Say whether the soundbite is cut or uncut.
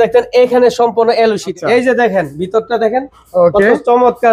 cut